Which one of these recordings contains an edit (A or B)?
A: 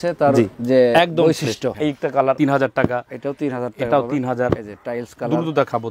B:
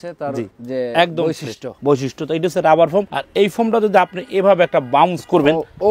A